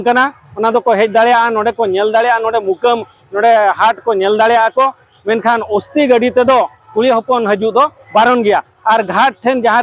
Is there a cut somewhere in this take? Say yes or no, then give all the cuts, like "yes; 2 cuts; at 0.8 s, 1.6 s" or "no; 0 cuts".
no; 0 cuts